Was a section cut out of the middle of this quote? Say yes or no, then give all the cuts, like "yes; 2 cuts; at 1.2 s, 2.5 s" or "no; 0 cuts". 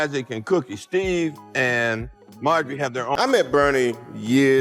yes; 1 cut; at 3.2 s